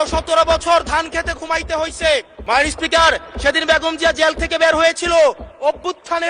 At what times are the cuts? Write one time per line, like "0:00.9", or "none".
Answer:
0:02.3